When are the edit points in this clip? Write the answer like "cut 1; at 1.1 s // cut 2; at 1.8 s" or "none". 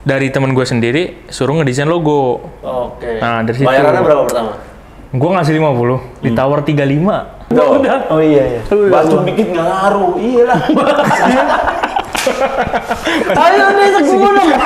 cut 1; at 7.5 s